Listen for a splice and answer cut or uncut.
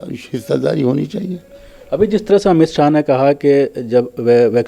uncut